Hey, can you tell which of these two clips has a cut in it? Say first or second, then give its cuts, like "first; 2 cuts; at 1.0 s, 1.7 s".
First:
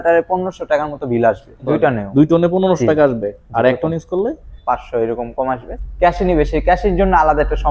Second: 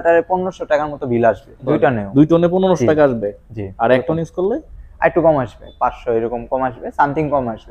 first; 3 cuts; at 3.4 s, 4.5 s, 5.7 s